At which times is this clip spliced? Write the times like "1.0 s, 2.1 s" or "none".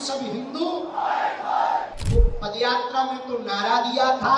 2.0 s

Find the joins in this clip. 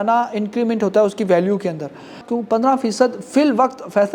2.2 s

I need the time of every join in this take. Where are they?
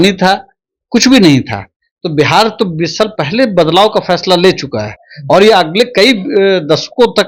none

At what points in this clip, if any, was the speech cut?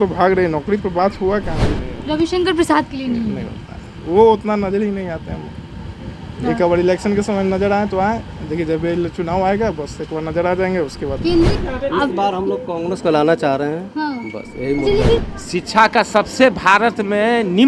1.8 s, 11.5 s, 15.2 s

